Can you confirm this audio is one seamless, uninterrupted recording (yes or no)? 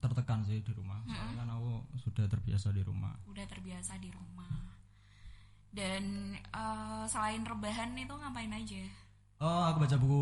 yes